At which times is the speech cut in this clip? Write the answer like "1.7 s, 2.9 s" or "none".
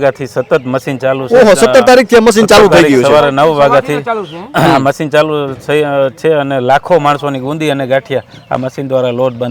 none